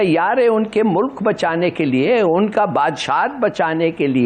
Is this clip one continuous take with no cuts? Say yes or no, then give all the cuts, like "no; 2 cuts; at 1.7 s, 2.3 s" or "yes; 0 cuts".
yes; 0 cuts